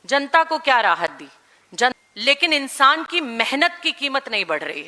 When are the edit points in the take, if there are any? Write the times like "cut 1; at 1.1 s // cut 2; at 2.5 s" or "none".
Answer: cut 1; at 2.0 s